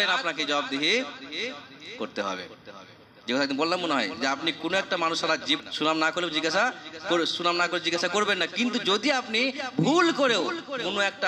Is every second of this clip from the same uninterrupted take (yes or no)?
no